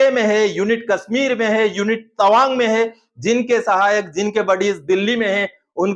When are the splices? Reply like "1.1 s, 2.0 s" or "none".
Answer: none